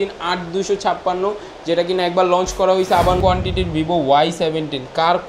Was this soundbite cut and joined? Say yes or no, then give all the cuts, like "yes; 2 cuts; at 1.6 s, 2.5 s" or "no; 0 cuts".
yes; 1 cut; at 3.2 s